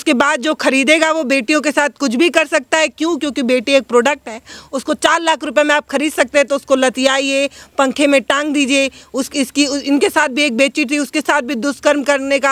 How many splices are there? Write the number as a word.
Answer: zero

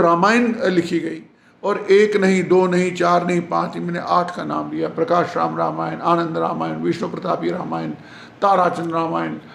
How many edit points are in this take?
zero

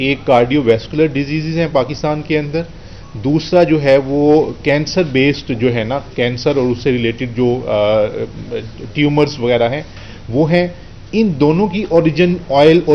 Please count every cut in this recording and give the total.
zero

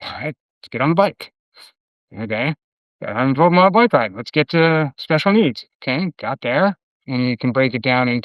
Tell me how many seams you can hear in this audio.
one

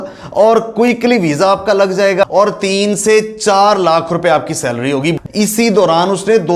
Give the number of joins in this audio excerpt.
two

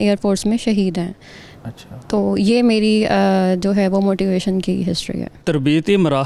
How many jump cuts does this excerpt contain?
one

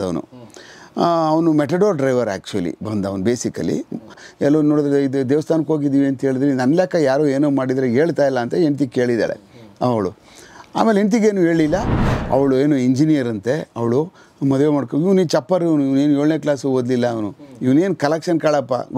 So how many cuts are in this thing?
two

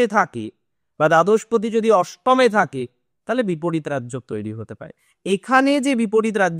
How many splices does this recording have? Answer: zero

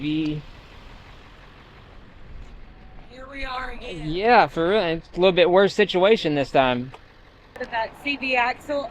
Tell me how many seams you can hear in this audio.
one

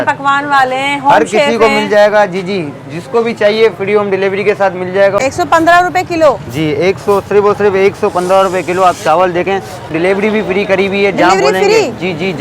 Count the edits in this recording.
two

